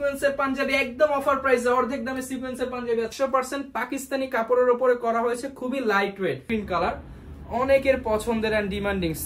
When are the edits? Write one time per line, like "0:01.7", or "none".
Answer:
0:03.1
0:06.4